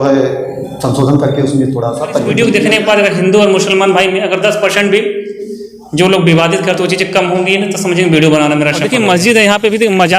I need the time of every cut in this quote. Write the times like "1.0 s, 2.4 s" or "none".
2.3 s, 8.9 s